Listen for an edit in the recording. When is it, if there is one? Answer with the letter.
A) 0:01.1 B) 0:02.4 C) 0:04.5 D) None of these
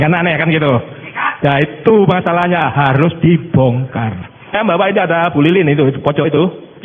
C